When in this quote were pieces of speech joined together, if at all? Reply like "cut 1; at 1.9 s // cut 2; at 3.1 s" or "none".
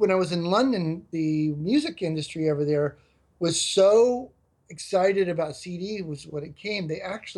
cut 1; at 1.0 s

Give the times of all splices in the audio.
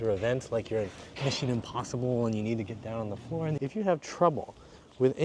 cut 1; at 3.6 s

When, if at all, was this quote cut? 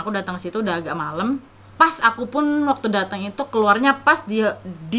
cut 1; at 1.7 s

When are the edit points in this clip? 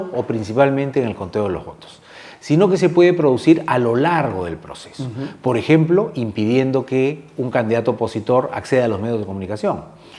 none

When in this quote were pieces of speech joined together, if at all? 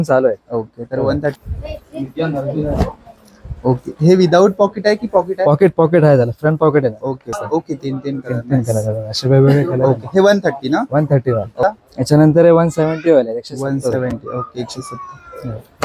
cut 1; at 1.5 s // cut 2; at 7.4 s // cut 3; at 11.6 s

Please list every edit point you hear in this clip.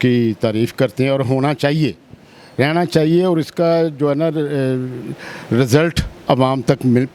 none

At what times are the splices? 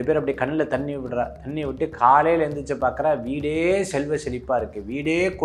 none

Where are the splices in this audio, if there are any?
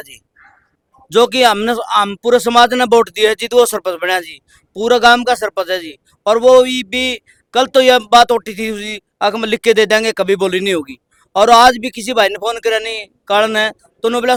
none

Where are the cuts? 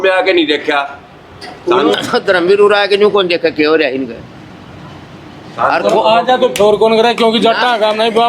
cut 1; at 1.9 s

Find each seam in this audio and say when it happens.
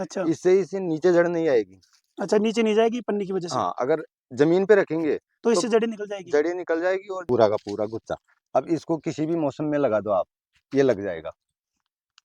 cut 1; at 7.2 s

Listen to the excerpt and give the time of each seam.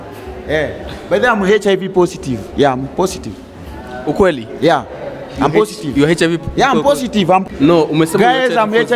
cut 1; at 7.5 s

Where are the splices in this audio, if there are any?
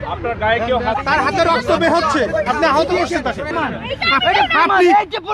cut 1; at 1.0 s // cut 2; at 3.5 s

